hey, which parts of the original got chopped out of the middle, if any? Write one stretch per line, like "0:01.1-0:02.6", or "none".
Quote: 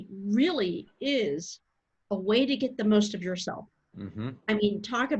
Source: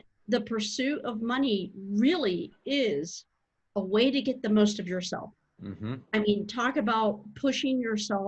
none